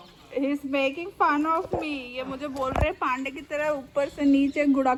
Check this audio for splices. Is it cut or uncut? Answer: uncut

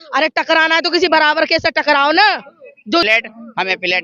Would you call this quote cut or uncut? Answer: cut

